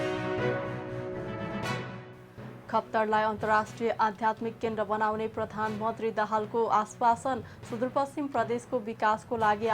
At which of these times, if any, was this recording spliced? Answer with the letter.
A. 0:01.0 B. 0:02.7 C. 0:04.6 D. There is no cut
A